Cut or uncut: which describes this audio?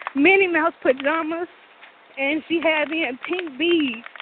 uncut